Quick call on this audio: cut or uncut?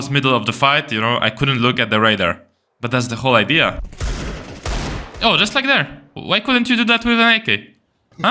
cut